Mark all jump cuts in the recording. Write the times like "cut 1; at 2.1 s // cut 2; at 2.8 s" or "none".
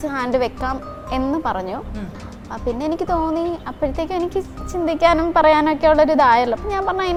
none